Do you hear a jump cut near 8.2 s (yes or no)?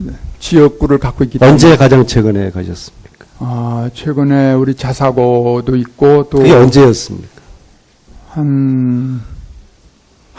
no